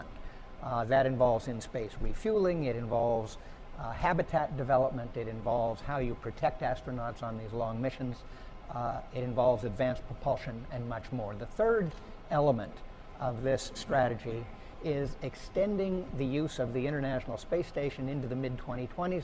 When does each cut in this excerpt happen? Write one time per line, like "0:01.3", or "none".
0:15.8